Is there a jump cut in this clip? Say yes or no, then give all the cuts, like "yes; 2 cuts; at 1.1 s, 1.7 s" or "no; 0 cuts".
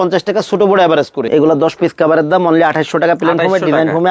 yes; 1 cut; at 1.2 s